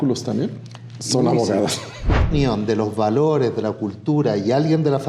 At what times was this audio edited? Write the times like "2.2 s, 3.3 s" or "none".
2.3 s